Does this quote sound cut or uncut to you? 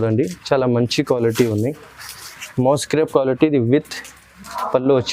uncut